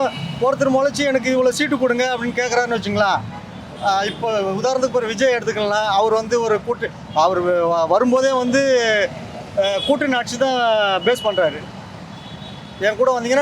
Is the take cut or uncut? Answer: uncut